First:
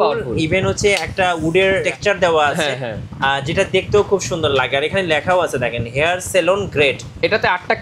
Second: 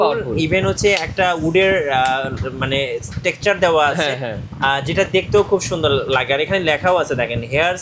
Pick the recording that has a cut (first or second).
first